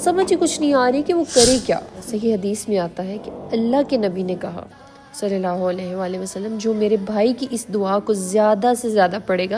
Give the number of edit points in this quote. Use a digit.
1